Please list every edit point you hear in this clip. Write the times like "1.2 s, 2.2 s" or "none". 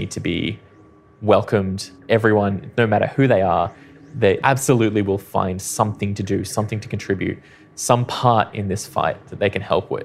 1.9 s, 4.4 s